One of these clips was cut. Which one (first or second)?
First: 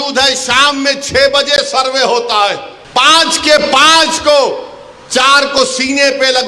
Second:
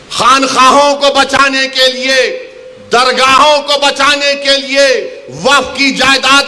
first